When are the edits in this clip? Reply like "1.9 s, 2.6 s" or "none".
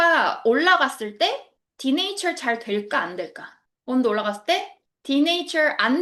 none